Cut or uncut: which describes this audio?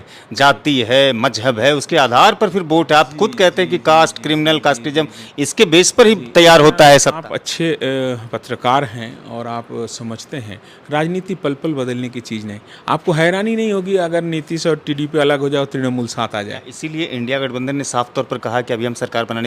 cut